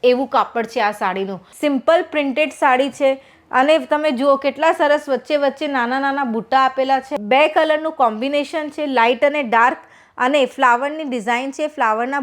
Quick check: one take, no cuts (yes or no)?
no